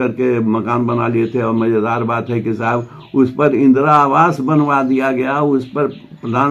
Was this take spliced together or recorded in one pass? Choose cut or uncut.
uncut